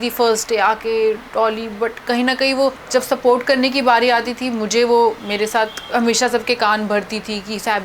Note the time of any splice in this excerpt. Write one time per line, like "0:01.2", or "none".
0:02.8
0:05.5